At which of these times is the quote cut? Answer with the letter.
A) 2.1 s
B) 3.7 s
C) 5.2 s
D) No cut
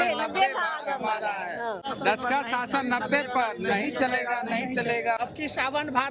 C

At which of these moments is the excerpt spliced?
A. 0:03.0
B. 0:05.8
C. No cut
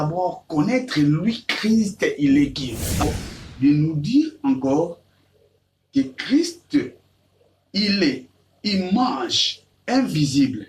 A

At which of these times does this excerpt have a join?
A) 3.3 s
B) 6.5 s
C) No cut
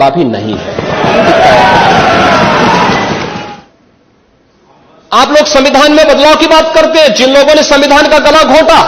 A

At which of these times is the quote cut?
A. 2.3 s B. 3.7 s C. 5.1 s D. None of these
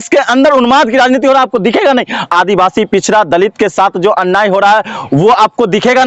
A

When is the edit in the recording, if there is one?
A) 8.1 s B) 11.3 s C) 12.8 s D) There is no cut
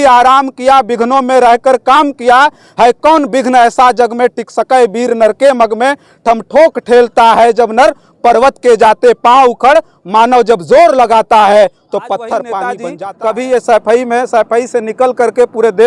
C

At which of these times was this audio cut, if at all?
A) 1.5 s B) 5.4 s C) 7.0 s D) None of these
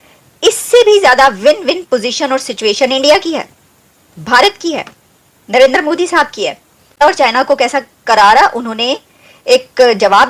C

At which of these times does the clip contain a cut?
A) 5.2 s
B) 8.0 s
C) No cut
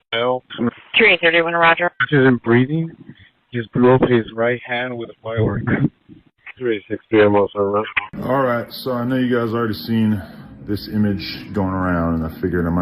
B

